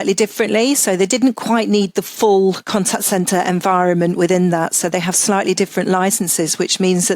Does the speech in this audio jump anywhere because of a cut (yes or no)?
yes